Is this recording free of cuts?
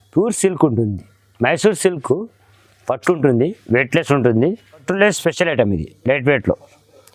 no; 1 cut; at 4.8 s

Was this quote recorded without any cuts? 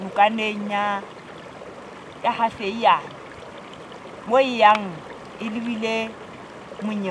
yes; 0 cuts

